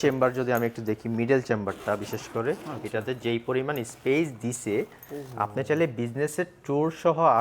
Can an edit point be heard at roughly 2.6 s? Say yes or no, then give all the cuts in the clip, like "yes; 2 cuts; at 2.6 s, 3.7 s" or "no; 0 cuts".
no; 0 cuts